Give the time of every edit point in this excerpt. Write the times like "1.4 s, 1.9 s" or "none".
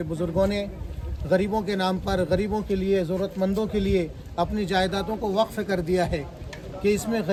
none